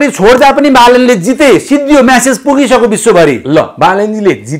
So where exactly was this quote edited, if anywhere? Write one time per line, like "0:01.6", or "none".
none